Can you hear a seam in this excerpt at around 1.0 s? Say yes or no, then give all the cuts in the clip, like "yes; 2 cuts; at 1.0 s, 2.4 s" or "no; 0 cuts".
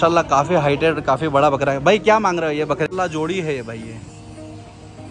no; 1 cut; at 2.9 s